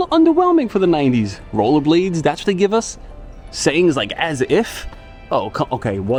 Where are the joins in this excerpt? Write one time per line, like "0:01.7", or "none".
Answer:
none